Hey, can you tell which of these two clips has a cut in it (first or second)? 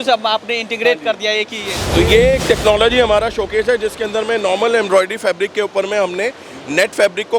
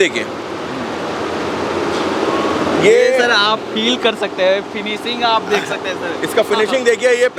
first